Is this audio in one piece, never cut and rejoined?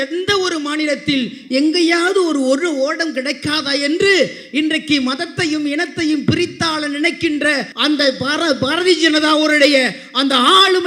no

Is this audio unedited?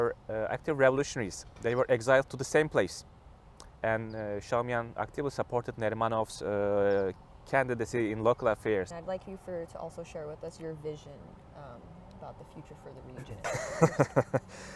no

